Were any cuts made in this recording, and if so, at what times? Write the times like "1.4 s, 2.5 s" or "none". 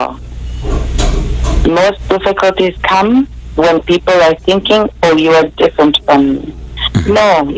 none